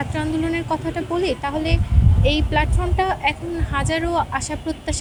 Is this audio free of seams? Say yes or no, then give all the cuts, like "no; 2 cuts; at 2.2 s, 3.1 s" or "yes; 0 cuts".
yes; 0 cuts